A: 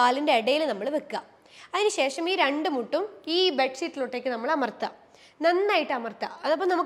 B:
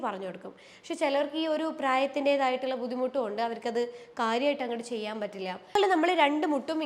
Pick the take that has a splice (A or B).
B